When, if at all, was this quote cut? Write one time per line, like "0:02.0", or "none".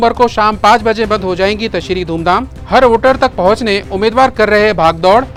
none